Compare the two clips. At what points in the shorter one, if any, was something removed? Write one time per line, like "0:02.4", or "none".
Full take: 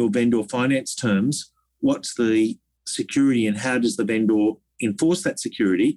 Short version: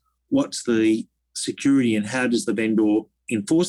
none